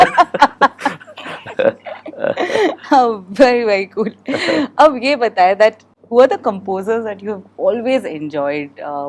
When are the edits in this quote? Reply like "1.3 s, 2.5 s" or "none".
none